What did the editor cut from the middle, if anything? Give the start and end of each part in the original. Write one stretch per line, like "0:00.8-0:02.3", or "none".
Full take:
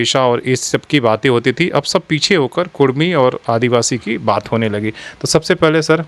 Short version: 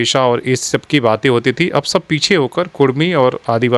none